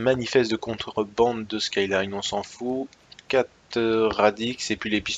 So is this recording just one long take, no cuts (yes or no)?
yes